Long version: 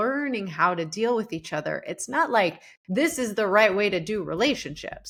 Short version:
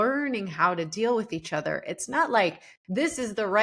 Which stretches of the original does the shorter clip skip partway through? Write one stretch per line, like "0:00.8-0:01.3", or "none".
none